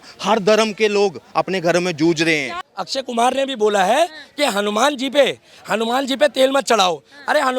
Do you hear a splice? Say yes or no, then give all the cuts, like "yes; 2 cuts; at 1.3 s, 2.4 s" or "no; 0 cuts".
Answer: yes; 1 cut; at 2.6 s